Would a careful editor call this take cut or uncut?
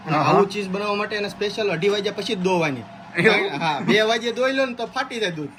uncut